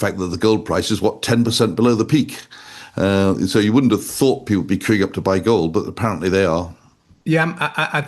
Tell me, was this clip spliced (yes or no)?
no